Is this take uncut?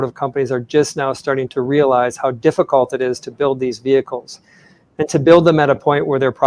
yes; 0 cuts

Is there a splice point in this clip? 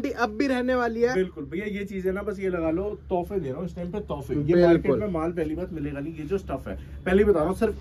no; 0 cuts

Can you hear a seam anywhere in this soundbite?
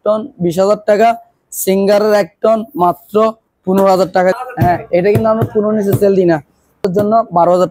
yes; 2 cuts; at 4.3 s, 6.8 s

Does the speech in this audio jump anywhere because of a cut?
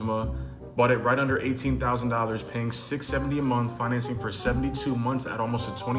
no; 0 cuts

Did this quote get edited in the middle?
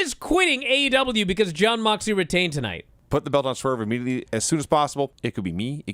yes; 2 cuts; at 2.9 s, 4.2 s

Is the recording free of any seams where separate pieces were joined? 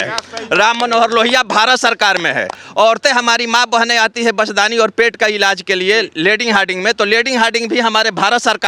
yes; 0 cuts

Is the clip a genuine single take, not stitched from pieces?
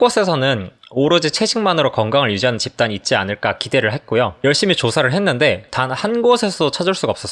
no; 1 cut; at 4.3 s

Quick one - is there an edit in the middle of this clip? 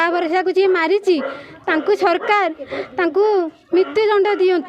no; 0 cuts

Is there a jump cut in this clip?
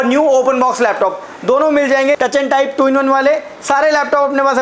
yes; 1 cut; at 2.2 s

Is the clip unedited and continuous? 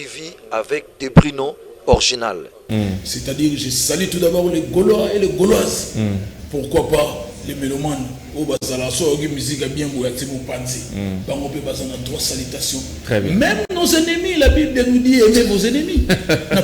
no; 1 cut; at 2.6 s

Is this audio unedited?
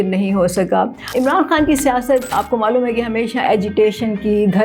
no; 2 cuts; at 1.0 s, 2.3 s

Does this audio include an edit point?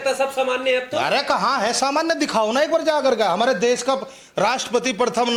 no; 0 cuts

